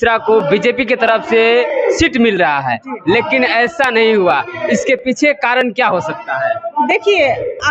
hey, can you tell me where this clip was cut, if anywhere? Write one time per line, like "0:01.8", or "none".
none